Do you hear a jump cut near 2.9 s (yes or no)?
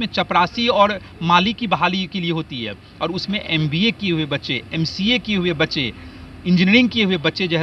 no